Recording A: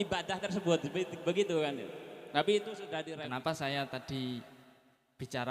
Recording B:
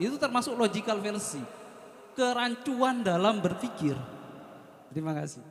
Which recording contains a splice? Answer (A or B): A